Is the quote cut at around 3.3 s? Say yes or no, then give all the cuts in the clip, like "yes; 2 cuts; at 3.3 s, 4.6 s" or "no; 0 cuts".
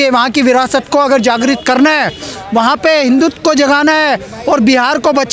no; 0 cuts